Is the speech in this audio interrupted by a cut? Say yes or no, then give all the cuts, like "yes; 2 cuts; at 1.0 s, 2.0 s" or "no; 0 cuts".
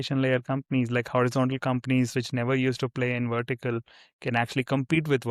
no; 0 cuts